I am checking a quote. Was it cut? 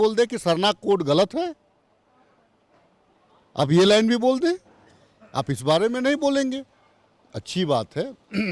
no; 0 cuts

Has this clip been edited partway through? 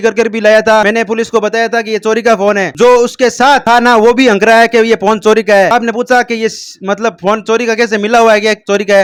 no; 0 cuts

